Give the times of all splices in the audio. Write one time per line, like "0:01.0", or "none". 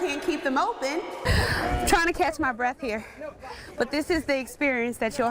0:01.2